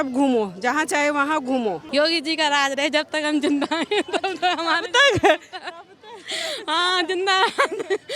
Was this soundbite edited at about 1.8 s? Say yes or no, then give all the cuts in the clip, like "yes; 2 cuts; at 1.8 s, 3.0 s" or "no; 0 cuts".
yes; 1 cut; at 1.8 s